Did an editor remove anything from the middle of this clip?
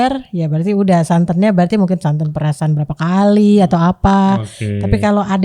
no; 0 cuts

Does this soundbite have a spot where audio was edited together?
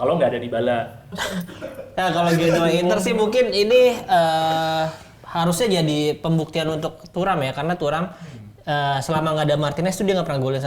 yes; 1 cut; at 1.1 s

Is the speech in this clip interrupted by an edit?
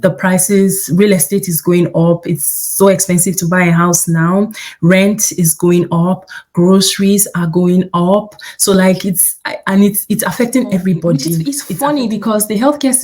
yes; 1 cut; at 11.6 s

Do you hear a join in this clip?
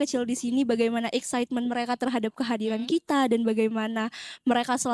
no; 0 cuts

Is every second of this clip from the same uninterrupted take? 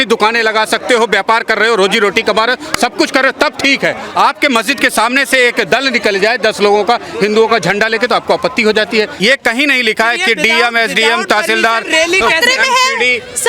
no; 1 cut; at 9.1 s

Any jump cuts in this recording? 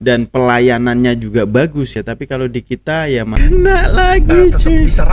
yes; 2 cuts; at 1.9 s, 3.4 s

